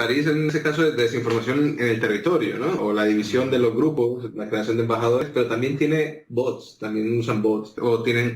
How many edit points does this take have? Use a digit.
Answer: 1